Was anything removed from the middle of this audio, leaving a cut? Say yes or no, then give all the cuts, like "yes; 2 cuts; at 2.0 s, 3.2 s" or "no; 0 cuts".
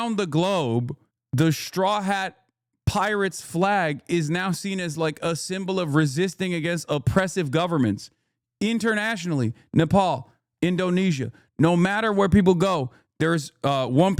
no; 0 cuts